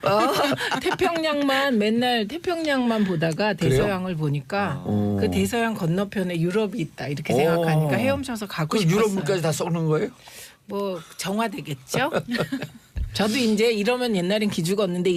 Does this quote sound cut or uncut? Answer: uncut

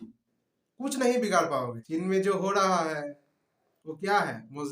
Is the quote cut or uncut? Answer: cut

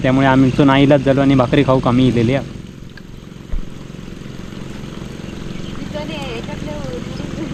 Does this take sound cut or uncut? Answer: uncut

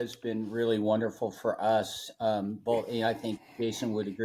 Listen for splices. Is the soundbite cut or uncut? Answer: uncut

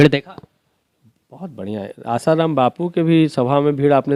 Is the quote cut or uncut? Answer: uncut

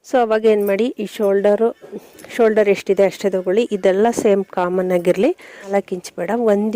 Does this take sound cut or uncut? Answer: cut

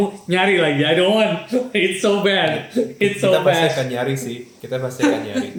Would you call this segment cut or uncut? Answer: uncut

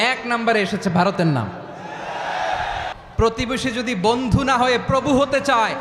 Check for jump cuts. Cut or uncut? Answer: cut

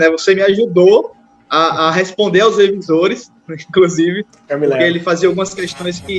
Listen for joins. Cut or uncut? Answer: uncut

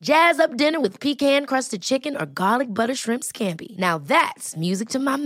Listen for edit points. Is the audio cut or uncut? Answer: uncut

